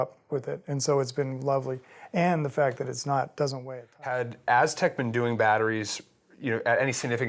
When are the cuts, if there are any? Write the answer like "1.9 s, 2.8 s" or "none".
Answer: 3.6 s